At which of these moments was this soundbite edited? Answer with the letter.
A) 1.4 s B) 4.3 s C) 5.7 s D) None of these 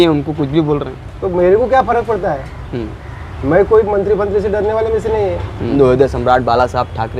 C